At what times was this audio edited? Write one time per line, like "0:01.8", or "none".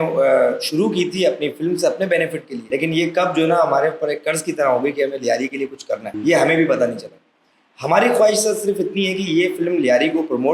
0:02.7
0:06.1